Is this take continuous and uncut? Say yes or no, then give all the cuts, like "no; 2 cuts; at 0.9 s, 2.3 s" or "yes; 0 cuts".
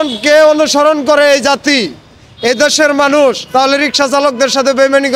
yes; 0 cuts